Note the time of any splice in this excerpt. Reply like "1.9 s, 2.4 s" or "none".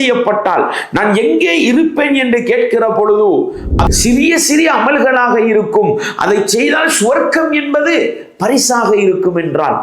3.7 s